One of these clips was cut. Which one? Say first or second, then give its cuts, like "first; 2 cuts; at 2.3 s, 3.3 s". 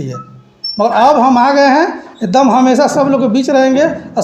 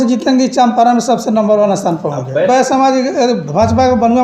second; 1 cut; at 2.5 s